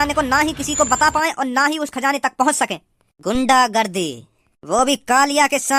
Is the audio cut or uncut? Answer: uncut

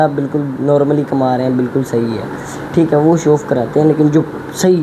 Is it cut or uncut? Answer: uncut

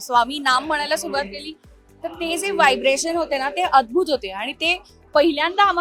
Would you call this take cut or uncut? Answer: uncut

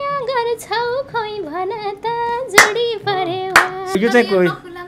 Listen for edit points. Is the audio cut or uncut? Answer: cut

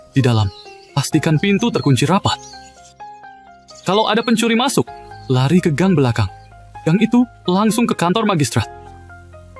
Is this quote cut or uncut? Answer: uncut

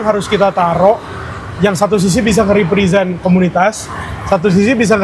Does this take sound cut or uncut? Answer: uncut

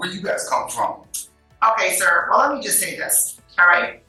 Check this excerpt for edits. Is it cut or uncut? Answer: uncut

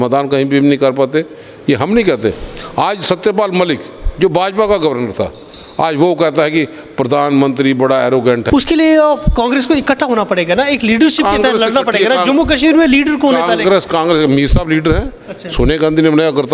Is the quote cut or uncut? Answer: cut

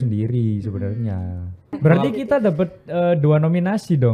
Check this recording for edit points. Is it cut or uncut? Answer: cut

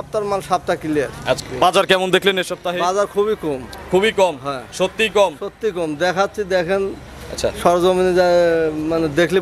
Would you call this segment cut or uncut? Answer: cut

